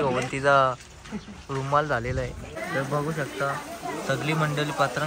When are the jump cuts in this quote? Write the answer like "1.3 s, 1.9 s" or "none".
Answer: 2.6 s